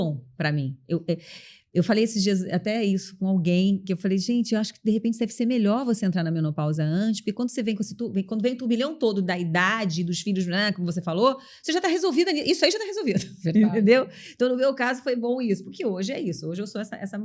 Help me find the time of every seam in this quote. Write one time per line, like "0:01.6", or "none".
none